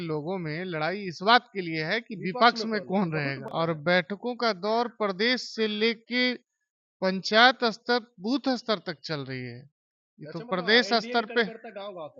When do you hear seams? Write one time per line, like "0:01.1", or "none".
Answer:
0:03.4

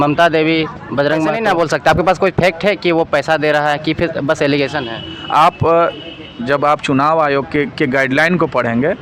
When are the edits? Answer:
0:01.4

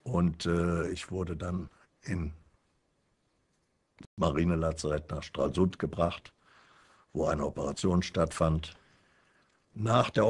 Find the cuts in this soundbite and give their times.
none

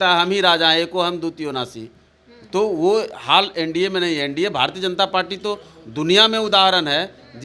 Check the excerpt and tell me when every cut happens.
none

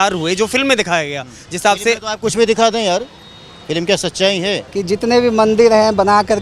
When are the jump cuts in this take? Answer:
0:04.7

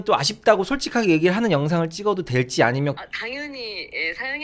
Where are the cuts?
0:03.0

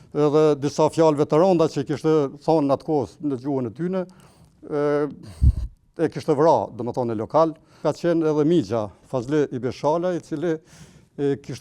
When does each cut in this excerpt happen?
0:07.8

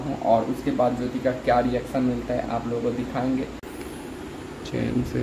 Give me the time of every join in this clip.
0:03.6

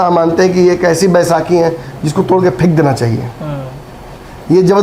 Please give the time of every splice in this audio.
none

